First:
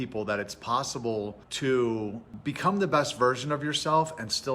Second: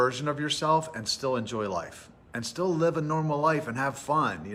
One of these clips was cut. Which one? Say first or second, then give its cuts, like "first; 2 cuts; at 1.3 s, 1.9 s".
first; 2 cuts; at 1.4 s, 2.3 s